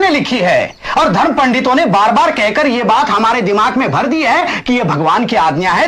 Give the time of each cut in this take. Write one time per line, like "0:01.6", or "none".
none